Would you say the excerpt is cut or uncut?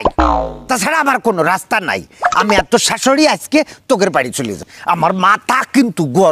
cut